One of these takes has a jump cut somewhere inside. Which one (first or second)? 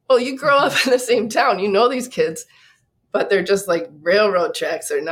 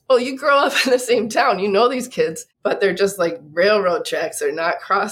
second